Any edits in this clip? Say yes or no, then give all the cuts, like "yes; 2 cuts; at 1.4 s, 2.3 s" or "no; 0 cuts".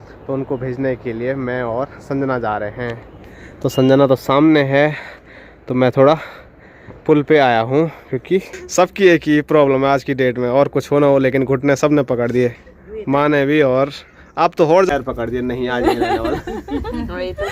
yes; 2 cuts; at 8.6 s, 14.9 s